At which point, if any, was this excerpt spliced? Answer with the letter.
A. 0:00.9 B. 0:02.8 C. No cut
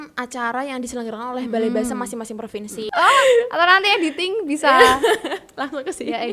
B